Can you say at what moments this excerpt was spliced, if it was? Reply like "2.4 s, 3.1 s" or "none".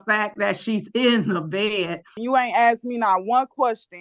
2.1 s